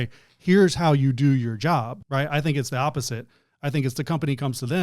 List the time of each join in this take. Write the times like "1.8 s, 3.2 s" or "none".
2.0 s